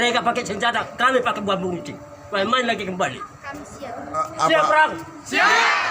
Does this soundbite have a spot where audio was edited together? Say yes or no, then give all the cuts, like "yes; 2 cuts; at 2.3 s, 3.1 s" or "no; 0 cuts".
yes; 1 cut; at 4.3 s